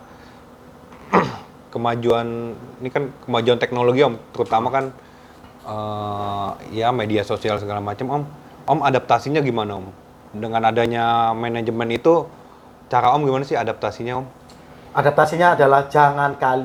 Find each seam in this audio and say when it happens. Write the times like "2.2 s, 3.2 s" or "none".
none